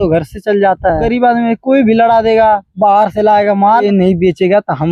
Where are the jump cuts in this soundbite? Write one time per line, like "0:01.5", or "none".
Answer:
0:01.1
0:03.8

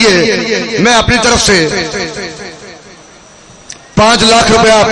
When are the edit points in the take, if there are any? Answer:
none

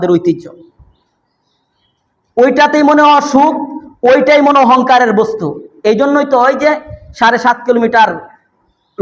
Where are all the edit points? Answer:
none

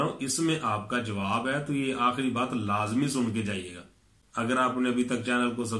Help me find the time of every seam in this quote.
none

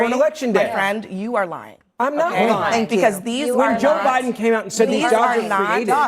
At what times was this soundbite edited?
0:04.1

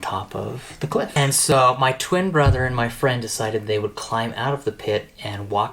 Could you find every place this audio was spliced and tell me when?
0:01.5

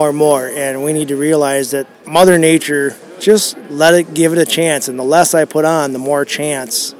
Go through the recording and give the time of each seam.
0:01.9
0:03.0

